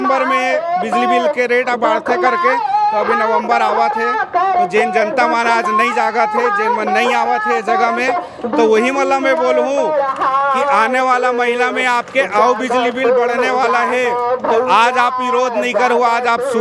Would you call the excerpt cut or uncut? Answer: uncut